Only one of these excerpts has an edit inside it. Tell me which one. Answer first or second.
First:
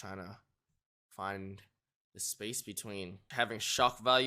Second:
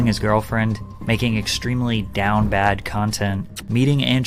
first